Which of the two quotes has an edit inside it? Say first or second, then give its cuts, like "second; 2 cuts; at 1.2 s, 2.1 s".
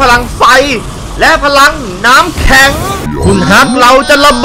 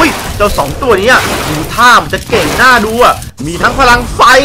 first; 1 cut; at 3.1 s